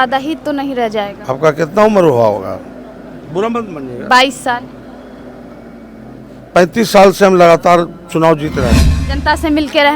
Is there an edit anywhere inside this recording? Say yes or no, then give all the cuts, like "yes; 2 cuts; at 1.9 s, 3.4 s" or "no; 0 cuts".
yes; 1 cut; at 8.8 s